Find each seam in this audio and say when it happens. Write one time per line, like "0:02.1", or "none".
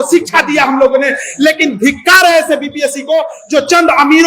none